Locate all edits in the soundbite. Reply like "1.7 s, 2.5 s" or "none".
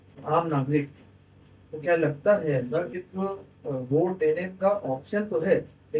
none